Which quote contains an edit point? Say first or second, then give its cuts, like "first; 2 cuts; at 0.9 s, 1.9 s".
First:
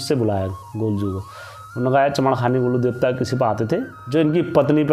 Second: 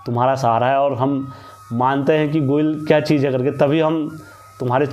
first; 1 cut; at 4.0 s